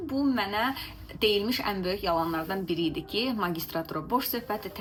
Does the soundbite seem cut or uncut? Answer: uncut